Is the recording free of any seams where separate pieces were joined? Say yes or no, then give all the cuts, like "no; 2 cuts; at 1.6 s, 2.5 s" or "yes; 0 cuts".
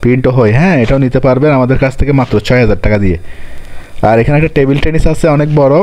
yes; 0 cuts